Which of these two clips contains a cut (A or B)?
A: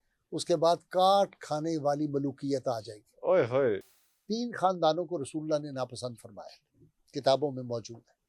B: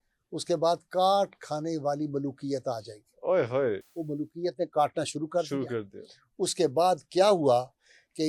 A